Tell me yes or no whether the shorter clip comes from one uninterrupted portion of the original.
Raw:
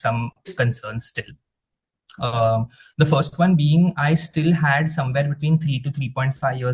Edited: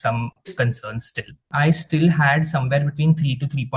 no